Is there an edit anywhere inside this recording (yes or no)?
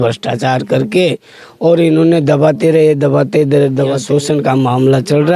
yes